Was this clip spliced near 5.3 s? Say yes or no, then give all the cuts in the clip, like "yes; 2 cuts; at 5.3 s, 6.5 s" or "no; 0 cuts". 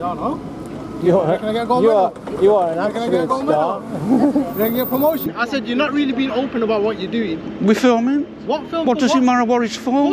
yes; 1 cut; at 5.3 s